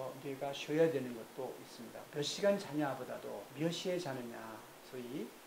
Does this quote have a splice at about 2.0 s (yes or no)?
yes